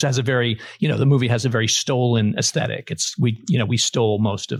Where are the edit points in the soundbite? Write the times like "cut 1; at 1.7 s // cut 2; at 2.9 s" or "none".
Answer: none